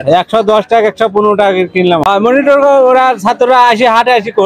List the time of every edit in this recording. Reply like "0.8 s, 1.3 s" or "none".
2.0 s